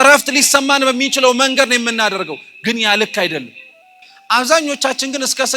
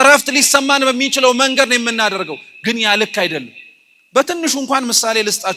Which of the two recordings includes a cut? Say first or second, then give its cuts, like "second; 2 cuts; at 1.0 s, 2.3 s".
first; 1 cut; at 3.9 s